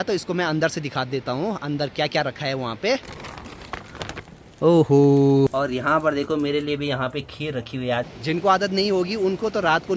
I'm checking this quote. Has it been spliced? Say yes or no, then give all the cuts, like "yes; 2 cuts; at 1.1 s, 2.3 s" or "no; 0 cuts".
yes; 3 cuts; at 3.2 s, 5.5 s, 8.1 s